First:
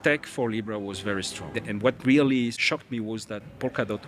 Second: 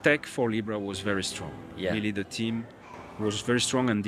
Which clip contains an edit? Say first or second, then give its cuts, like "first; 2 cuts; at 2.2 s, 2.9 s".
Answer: first; 2 cuts; at 1.6 s, 2.6 s